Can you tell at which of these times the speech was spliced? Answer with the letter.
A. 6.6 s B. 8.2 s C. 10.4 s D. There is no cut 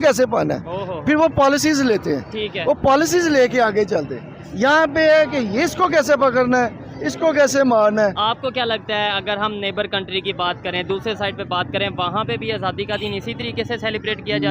B